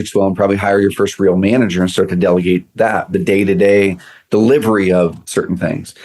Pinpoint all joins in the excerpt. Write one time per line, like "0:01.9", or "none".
none